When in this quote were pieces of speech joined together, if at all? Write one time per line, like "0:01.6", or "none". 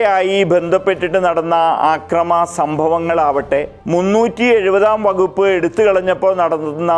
0:03.8